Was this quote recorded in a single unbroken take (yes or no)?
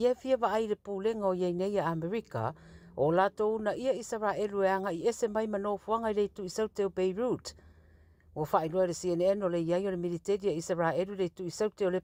yes